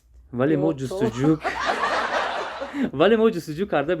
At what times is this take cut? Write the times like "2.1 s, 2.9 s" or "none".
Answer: none

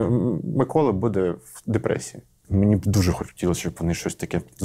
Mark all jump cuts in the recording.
2.5 s

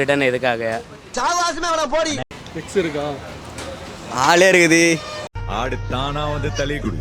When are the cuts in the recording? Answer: 2.2 s

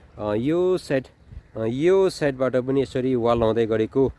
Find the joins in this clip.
none

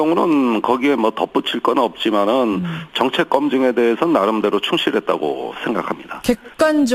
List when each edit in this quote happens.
none

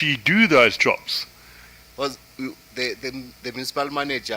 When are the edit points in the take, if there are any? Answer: 1.7 s

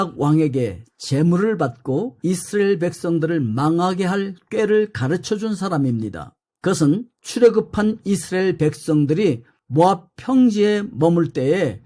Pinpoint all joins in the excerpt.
none

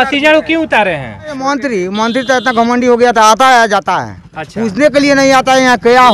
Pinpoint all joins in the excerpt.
1.5 s

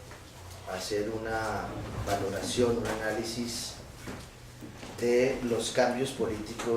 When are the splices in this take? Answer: 4.8 s

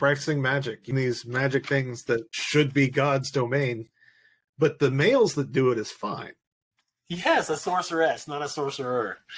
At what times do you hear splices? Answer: 0.9 s, 2.3 s

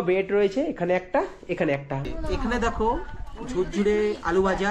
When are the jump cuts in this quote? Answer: 2.1 s

